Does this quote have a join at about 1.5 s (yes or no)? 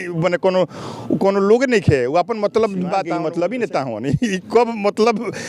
no